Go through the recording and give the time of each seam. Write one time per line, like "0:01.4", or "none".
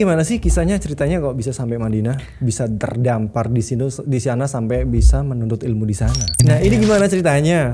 0:06.3